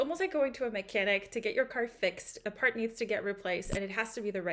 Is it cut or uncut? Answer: cut